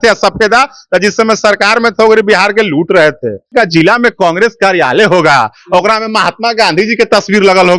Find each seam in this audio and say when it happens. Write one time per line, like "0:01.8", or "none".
0:03.5